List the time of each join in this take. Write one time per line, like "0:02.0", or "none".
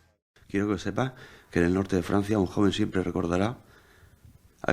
0:01.2